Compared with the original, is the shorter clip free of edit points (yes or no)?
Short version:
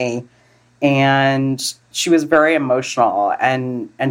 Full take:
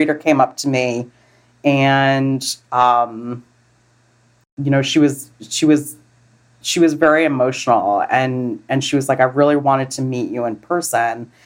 no